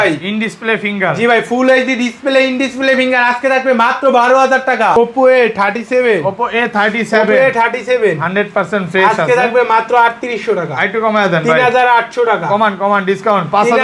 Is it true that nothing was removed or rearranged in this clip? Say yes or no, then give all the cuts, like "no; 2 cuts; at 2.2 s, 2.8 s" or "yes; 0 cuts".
no; 1 cut; at 5.0 s